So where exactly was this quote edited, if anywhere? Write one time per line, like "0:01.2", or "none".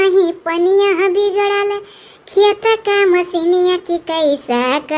none